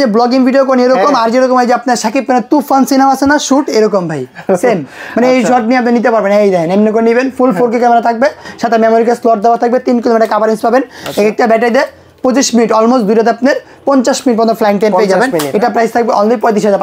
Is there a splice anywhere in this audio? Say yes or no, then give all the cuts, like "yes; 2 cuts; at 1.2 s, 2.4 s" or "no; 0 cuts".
no; 0 cuts